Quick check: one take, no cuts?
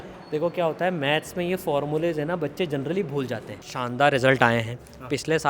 no; 1 cut; at 3.6 s

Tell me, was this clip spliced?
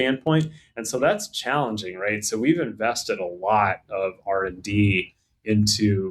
no; 0 cuts

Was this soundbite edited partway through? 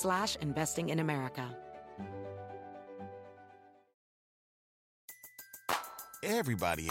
yes; 1 cut; at 1.5 s

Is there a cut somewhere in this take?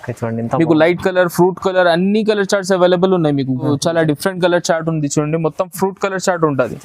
yes; 1 cut; at 3.7 s

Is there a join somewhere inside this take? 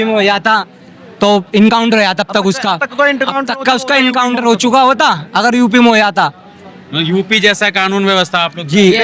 no; 0 cuts

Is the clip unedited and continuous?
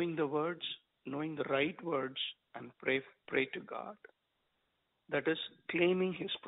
no; 1 cut; at 3.2 s

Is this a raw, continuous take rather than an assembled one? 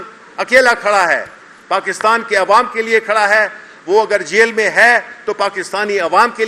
yes; 0 cuts

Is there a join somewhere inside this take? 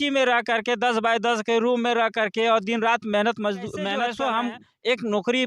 yes; 1 cut; at 3.9 s

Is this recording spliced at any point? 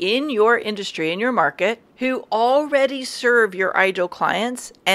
yes; 1 cut; at 1.9 s

